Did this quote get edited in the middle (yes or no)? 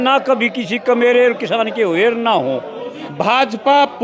yes